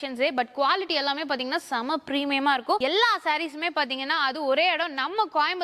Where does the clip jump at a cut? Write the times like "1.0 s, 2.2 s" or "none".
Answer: 2.8 s